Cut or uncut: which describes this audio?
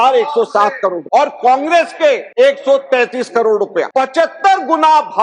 cut